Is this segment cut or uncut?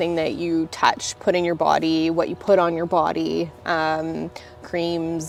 uncut